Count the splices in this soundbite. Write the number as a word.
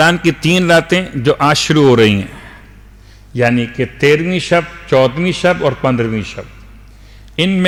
zero